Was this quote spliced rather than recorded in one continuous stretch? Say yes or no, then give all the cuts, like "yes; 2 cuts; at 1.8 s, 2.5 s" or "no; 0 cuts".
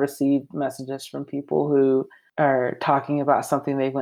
yes; 1 cut; at 2.2 s